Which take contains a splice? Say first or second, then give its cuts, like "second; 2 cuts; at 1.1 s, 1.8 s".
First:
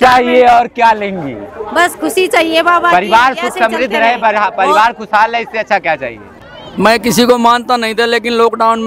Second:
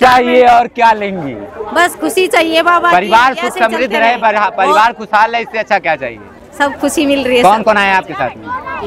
first; 1 cut; at 6.4 s